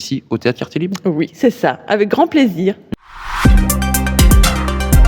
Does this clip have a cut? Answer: yes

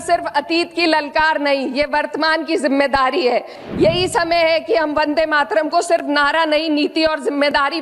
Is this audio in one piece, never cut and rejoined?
no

